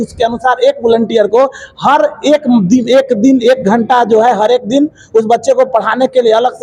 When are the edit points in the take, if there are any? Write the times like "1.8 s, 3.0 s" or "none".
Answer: none

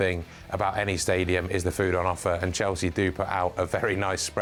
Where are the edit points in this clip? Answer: none

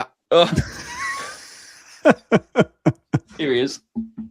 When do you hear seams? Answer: 3.3 s

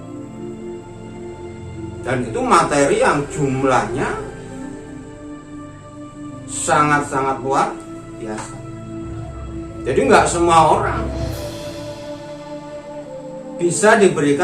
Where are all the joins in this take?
2.0 s, 4.3 s, 6.5 s, 10.9 s, 13.3 s

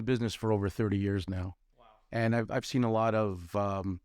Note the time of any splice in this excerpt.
none

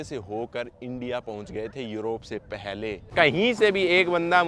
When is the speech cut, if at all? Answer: 3.1 s

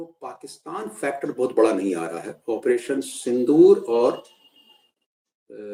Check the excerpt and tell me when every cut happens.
none

